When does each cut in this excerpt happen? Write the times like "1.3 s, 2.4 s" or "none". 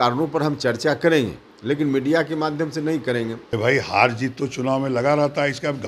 3.4 s